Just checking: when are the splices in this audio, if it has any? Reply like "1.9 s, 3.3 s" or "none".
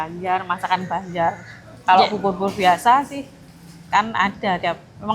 none